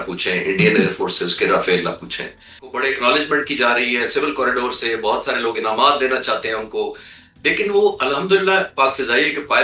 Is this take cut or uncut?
cut